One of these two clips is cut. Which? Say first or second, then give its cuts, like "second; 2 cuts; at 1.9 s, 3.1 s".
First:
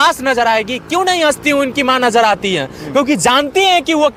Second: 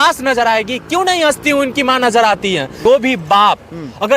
second; 1 cut; at 2.8 s